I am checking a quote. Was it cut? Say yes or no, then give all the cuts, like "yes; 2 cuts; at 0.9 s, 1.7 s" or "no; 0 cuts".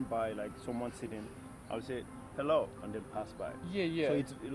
no; 0 cuts